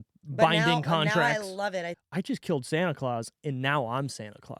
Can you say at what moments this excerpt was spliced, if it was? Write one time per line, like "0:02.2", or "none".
0:02.0